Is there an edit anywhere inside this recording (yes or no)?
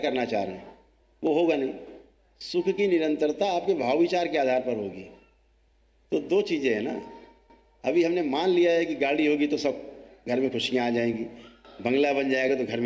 no